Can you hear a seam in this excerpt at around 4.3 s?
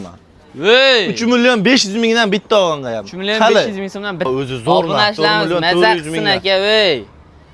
yes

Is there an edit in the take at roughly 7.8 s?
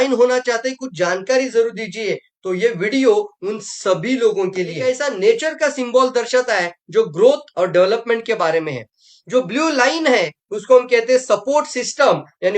no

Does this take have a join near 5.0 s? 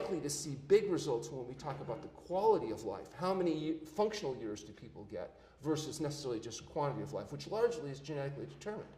yes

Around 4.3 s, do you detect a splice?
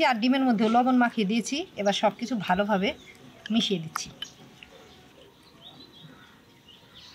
no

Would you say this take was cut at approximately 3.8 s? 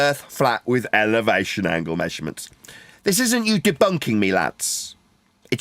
no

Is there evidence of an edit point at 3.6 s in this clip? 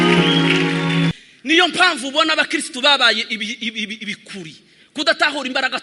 no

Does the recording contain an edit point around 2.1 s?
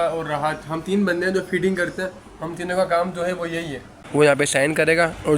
no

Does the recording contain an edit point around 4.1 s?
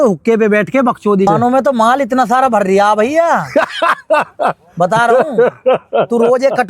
no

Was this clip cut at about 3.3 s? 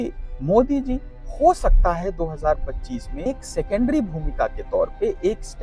yes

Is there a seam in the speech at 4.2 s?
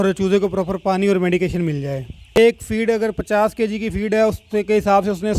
no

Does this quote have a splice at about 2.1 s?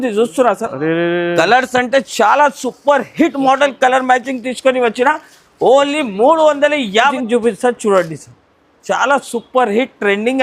no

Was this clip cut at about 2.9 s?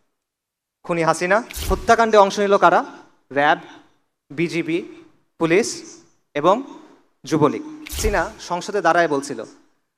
no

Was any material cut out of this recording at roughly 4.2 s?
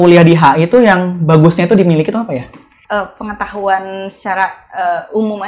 no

